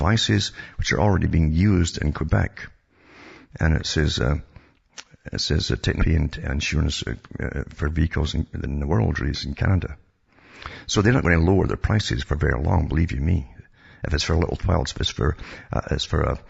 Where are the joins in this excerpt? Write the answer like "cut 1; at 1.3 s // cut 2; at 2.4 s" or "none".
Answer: none

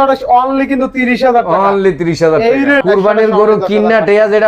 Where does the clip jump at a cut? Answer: cut 1; at 2.8 s

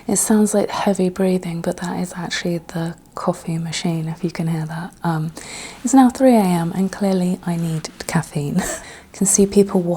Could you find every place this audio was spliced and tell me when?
cut 1; at 8.8 s

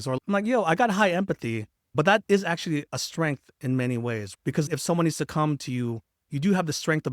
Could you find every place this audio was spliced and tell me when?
cut 1; at 4.7 s

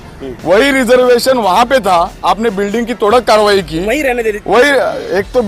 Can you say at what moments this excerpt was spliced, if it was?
none

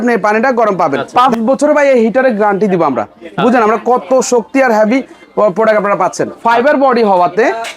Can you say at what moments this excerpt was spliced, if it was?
cut 1; at 1.0 s // cut 2; at 6.3 s

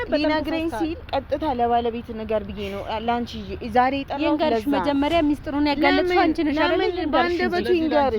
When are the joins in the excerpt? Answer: cut 1; at 1.0 s

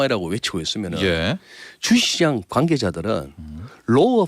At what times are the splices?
cut 1; at 2.4 s

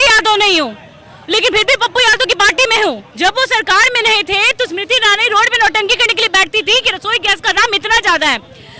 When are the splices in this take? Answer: cut 1; at 3.1 s

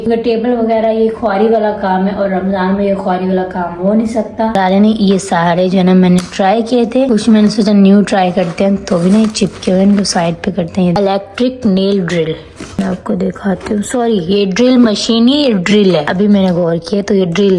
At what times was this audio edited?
cut 1; at 4.5 s // cut 2; at 11.0 s

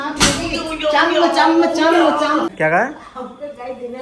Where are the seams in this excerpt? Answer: cut 1; at 2.5 s

